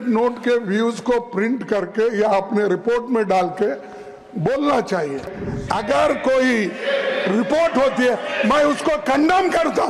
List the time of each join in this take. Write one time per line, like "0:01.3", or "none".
0:05.4